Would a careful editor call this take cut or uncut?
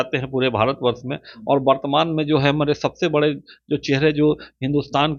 uncut